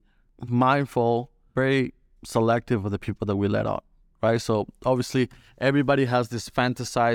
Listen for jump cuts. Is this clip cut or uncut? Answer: cut